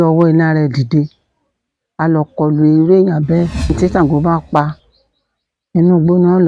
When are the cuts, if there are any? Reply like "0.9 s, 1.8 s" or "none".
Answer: 3.7 s

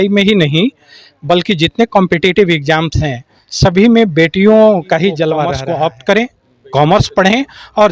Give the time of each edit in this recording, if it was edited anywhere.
5.5 s

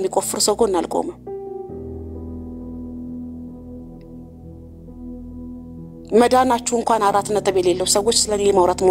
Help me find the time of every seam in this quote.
none

